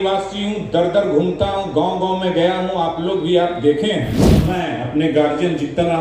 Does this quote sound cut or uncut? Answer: cut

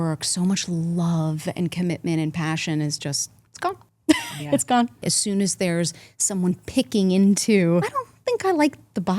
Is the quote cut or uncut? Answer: cut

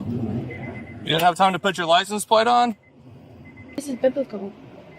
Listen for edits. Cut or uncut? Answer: cut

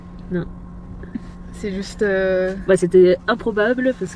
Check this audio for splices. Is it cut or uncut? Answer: uncut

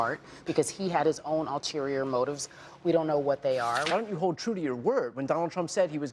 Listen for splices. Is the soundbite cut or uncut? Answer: cut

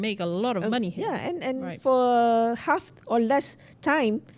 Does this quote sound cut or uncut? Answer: uncut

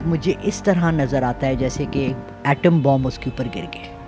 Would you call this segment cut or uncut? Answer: uncut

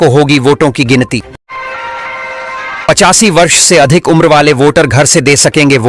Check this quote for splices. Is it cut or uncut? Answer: cut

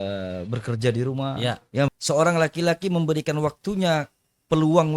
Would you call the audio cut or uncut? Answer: cut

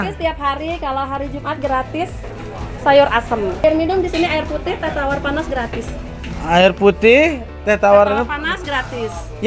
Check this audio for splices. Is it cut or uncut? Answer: cut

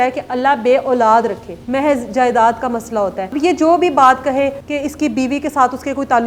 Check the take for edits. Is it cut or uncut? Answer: cut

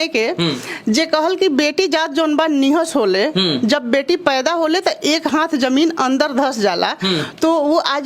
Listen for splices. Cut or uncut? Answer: uncut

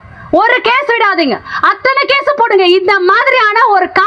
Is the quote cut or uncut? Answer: uncut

